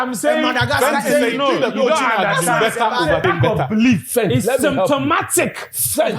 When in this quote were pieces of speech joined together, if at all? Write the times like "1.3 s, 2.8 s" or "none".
3.2 s